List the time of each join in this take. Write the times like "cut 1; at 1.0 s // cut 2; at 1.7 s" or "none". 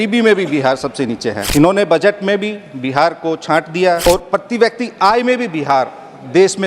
cut 1; at 1.4 s // cut 2; at 4.0 s